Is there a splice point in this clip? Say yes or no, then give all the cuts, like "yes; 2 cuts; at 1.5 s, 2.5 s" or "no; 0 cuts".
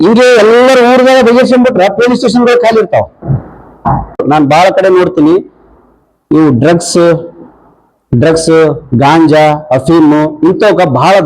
yes; 1 cut; at 4.2 s